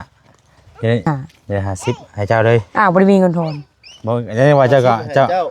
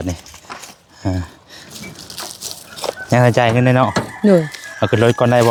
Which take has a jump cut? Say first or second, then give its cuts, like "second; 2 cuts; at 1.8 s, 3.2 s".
first; 1 cut; at 1.1 s